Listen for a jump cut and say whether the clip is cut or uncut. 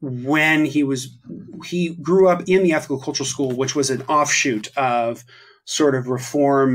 uncut